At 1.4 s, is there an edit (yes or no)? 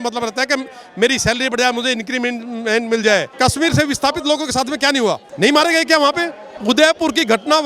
no